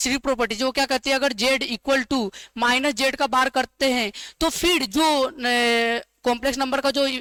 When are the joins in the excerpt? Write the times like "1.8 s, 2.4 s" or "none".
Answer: none